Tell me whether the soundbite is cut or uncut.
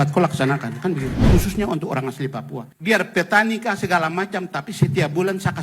cut